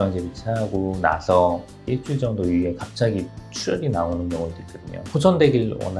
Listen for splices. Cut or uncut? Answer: cut